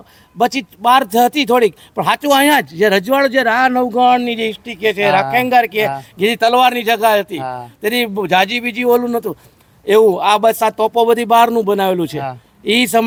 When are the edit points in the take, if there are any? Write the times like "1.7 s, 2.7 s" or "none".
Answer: none